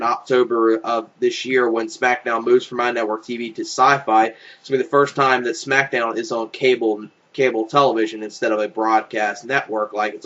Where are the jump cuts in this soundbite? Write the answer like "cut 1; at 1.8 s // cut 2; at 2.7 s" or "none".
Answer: cut 1; at 4.2 s